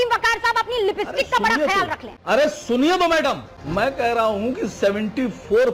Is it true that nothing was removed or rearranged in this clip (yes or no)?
yes